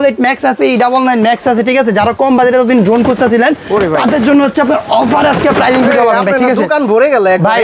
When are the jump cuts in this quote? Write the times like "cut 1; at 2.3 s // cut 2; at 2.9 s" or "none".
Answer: none